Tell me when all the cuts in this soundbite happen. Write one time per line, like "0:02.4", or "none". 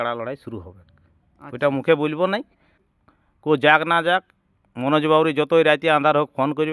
0:02.9